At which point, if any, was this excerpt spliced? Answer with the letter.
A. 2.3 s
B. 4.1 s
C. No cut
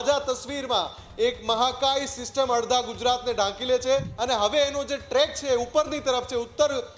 B